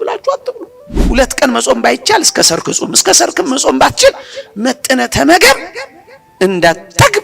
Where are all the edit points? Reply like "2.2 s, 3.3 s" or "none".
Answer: 1.0 s